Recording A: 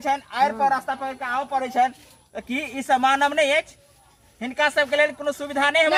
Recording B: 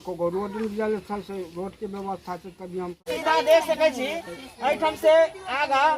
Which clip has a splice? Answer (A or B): B